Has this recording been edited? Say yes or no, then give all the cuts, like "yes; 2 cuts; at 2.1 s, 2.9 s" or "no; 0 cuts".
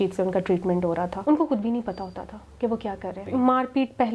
yes; 2 cuts; at 1.1 s, 3.2 s